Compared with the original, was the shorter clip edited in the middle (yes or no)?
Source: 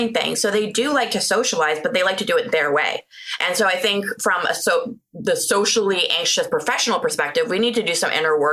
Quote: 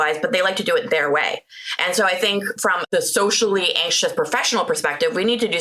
yes